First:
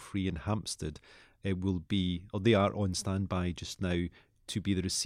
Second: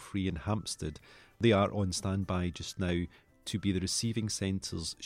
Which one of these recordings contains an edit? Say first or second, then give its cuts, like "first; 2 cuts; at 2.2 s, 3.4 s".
second; 1 cut; at 1.4 s